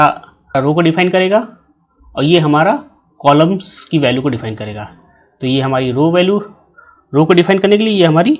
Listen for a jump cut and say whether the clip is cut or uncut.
uncut